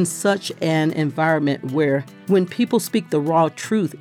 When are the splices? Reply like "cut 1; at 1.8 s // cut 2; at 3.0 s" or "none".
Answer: cut 1; at 2.1 s